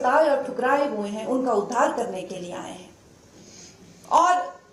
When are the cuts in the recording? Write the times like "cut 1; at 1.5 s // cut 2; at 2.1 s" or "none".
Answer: none